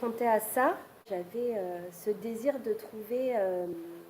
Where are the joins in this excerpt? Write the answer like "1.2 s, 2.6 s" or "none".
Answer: 1.1 s